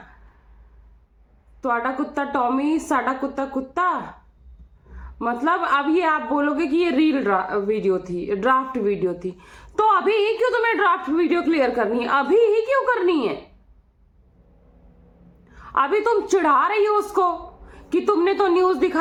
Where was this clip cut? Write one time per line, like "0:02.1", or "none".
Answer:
none

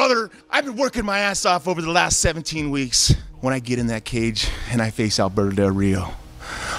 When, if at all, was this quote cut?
none

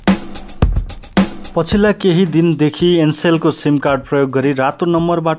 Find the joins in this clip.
0:01.2

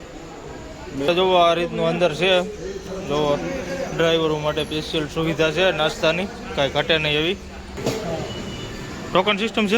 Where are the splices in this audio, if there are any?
0:01.1
0:07.8

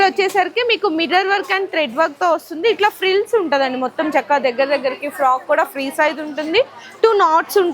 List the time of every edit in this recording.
none

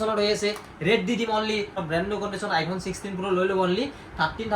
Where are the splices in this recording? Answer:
0:01.8

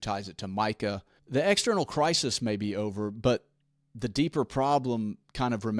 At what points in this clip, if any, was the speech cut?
0:01.2

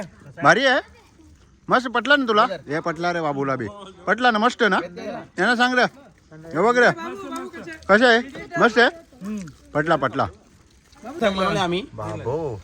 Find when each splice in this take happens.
0:11.2

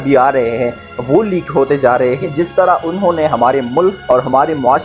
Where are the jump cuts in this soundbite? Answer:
0:02.2

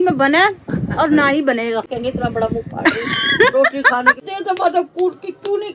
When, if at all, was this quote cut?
0:01.9
0:03.2
0:04.2

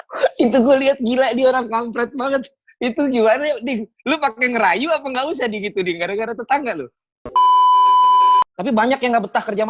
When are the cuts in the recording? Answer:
0:07.2
0:08.6

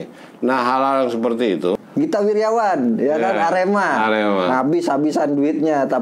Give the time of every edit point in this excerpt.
0:01.8

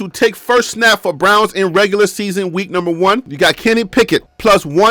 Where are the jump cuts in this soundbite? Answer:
none

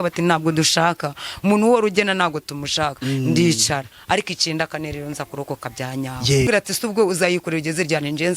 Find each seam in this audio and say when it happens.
0:06.5

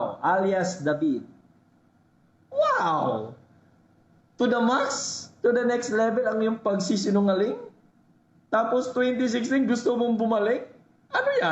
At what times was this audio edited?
none

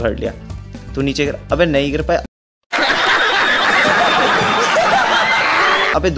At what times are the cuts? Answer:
none

